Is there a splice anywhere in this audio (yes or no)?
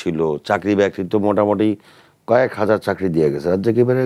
no